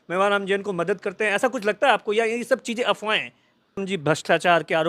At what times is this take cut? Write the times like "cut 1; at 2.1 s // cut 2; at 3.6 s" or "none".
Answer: cut 1; at 3.8 s